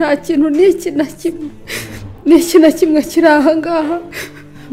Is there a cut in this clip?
no; 0 cuts

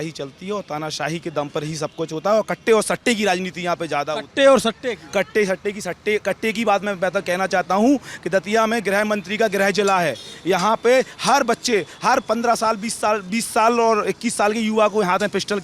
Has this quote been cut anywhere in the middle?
no; 0 cuts

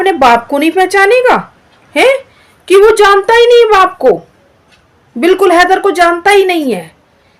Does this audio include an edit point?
no; 0 cuts

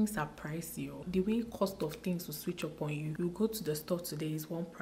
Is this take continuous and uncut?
no; 2 cuts; at 1.0 s, 3.1 s

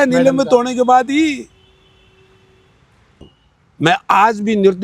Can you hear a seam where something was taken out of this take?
yes; 1 cut; at 3.1 s

